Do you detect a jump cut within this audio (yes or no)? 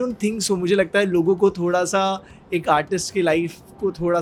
no